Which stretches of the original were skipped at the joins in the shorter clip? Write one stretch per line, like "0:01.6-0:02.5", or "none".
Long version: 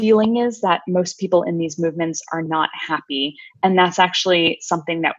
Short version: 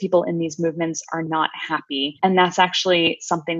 0:03.3-0:03.5

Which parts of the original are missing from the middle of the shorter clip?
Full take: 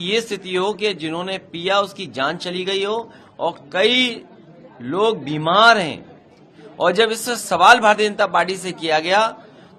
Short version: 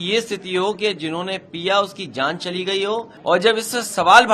0:03.1-0:06.7

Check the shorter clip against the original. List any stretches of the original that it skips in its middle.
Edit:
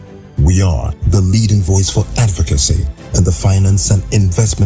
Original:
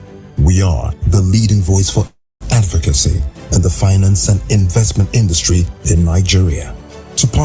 0:02.5-0:02.9

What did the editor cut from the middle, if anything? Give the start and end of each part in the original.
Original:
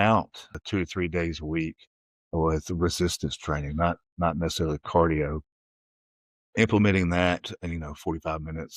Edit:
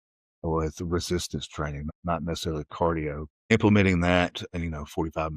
0:03.7-0:04.0
0:05.6-0:06.6

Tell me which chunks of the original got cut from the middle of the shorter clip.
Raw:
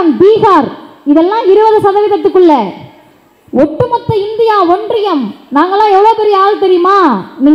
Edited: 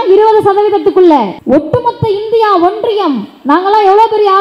0:02.7-0:03.4

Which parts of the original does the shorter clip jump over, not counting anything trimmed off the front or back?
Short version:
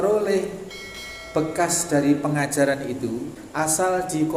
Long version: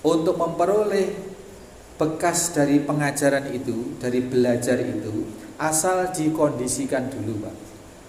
0:04.0-0:05.4

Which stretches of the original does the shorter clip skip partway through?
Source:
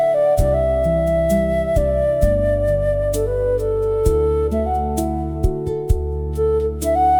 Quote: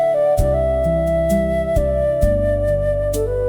none

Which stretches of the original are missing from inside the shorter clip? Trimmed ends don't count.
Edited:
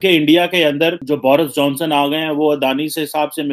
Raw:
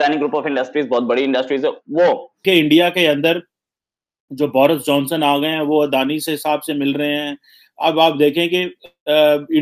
0:03.4-0:04.3

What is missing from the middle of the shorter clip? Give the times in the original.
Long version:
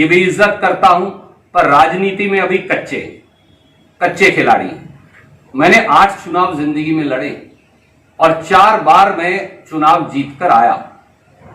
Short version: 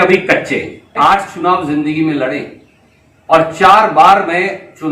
0:03.4-0:05.9

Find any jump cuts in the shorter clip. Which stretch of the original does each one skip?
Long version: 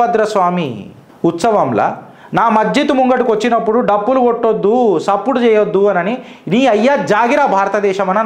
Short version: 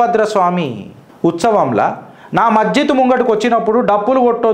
none

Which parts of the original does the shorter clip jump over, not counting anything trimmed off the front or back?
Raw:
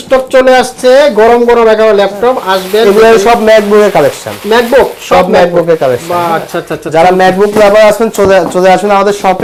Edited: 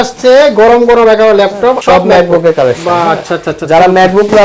0:02.4-0:05.0

